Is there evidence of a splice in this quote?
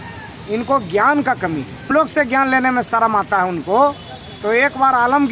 yes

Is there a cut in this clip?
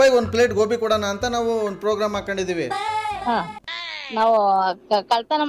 yes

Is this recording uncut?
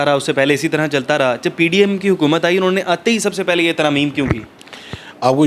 yes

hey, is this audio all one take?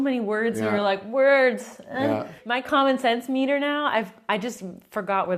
no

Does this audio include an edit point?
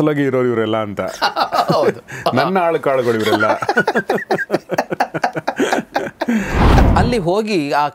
yes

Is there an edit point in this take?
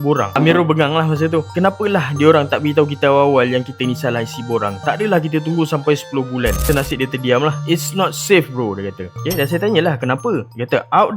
yes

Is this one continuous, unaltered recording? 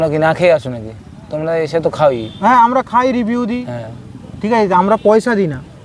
yes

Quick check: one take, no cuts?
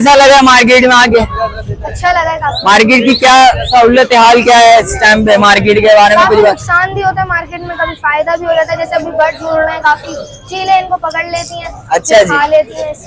yes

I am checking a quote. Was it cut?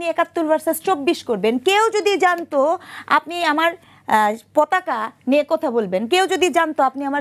no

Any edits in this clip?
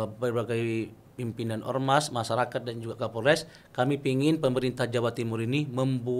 no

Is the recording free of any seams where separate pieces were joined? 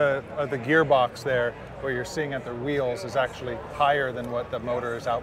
yes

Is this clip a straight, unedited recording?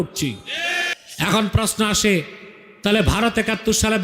no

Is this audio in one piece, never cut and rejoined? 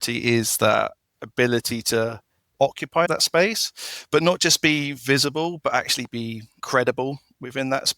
no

